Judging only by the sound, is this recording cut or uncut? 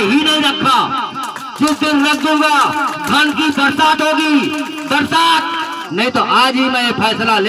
cut